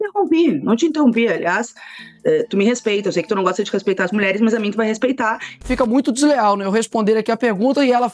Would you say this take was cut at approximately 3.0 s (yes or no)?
no